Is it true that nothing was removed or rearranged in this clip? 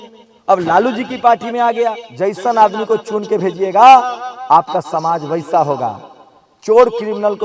no; 1 cut; at 2.0 s

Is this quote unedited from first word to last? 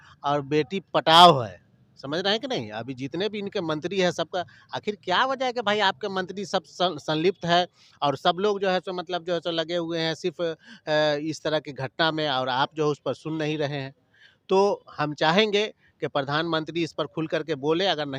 yes; 0 cuts

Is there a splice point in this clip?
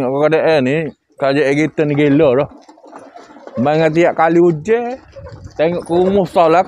no; 0 cuts

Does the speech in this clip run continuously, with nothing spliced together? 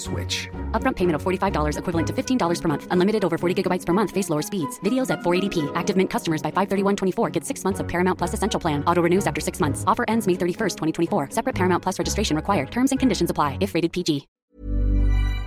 no; 1 cut; at 14.5 s

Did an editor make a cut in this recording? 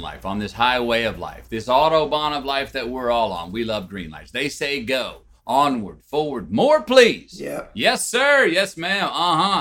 no; 0 cuts

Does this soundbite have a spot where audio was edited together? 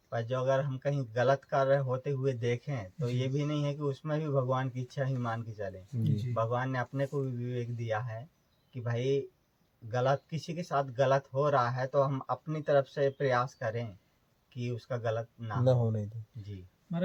no; 0 cuts

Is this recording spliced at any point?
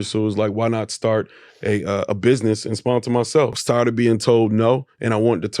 yes; 1 cut; at 3.6 s

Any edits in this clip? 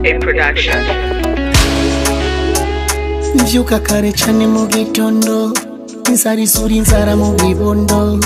no; 0 cuts

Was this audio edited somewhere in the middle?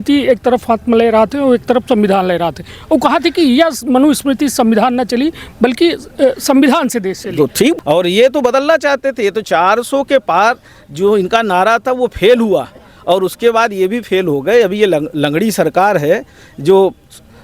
yes; 1 cut; at 7.8 s

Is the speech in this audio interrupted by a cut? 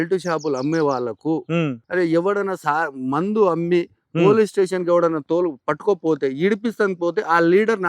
yes; 1 cut; at 1.8 s

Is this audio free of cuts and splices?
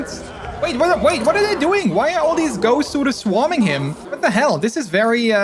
yes; 0 cuts

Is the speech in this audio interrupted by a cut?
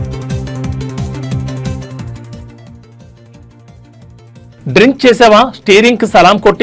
no; 0 cuts

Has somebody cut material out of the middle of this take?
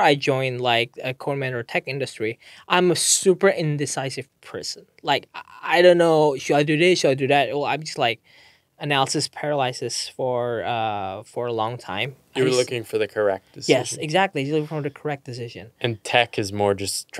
no; 0 cuts

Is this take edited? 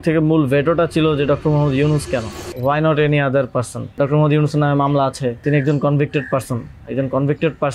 yes; 3 cuts; at 2.4 s, 4.0 s, 5.4 s

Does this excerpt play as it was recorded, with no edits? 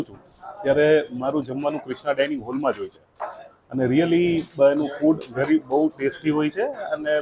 yes; 0 cuts

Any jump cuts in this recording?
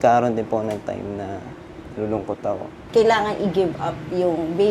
yes; 1 cut; at 2.8 s

